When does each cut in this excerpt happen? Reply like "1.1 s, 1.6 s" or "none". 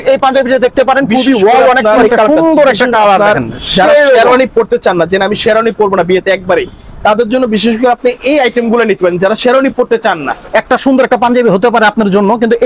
2.0 s, 10.3 s